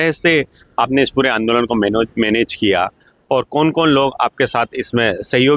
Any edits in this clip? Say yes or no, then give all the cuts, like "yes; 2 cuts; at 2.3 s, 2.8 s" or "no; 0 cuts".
no; 0 cuts